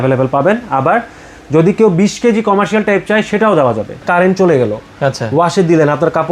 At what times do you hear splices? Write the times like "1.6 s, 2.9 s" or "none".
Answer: 4.0 s